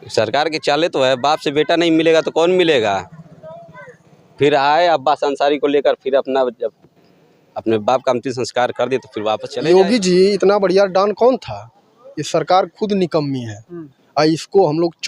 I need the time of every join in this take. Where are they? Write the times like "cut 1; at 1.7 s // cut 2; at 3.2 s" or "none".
cut 1; at 9.5 s